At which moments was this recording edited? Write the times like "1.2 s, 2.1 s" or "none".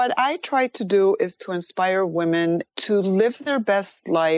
2.7 s, 3.4 s

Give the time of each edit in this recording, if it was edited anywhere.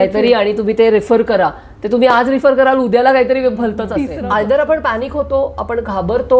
4.2 s

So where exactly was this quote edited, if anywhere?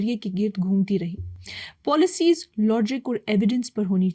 none

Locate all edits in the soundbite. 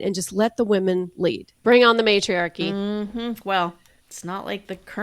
1.5 s

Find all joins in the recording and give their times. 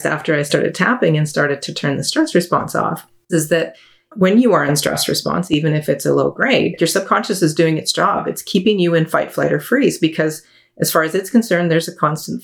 3.1 s

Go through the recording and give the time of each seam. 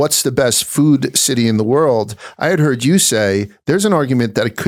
none

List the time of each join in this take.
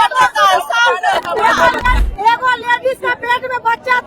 2.0 s

